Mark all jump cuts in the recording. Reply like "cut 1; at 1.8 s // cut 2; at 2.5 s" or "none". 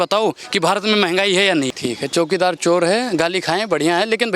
cut 1; at 1.7 s